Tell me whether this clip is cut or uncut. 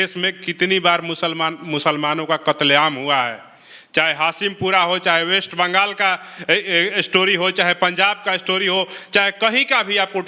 uncut